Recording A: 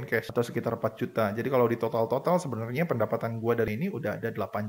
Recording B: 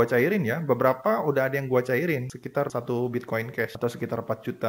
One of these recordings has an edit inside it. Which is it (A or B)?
A